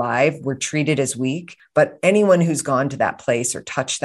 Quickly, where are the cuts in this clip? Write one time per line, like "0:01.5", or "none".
0:01.5